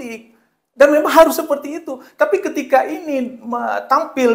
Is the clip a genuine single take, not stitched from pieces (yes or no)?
yes